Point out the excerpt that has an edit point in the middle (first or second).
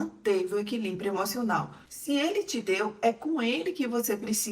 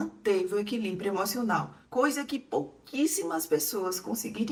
first